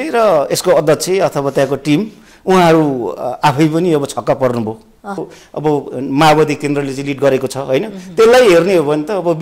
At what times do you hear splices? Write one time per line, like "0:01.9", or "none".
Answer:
0:05.2